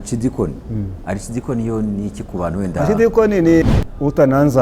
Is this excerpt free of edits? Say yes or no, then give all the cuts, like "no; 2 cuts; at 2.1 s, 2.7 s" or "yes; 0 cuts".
no; 1 cut; at 3.7 s